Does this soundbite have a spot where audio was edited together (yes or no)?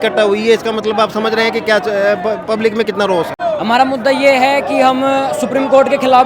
no